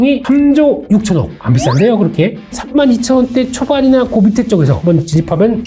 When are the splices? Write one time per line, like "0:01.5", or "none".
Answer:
0:02.5